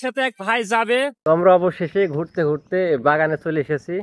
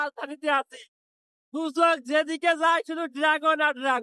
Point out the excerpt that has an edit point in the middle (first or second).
first